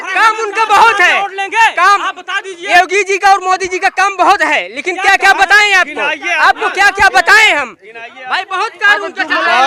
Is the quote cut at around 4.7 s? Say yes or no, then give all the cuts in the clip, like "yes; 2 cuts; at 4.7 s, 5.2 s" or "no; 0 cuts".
no; 0 cuts